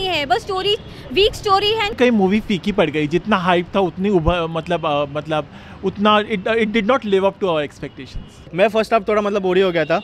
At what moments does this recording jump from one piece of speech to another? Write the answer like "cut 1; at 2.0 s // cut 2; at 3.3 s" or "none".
cut 1; at 2.0 s // cut 2; at 8.5 s